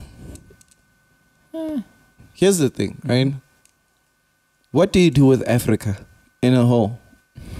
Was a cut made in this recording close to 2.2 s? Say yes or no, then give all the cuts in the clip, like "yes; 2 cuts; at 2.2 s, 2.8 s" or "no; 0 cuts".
yes; 1 cut; at 2.2 s